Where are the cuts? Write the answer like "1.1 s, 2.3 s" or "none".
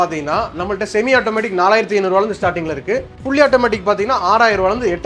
none